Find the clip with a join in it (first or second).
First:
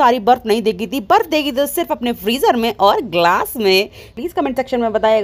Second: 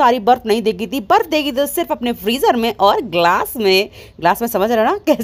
first